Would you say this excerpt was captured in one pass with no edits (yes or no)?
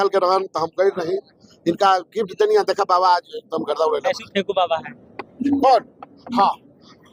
yes